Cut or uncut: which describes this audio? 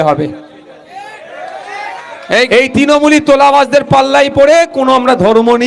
uncut